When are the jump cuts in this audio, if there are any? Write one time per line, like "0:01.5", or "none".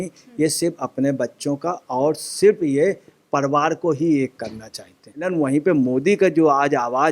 0:05.3